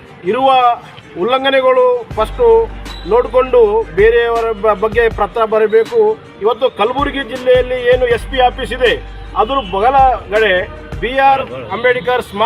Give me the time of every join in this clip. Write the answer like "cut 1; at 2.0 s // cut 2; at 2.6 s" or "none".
cut 1; at 6.3 s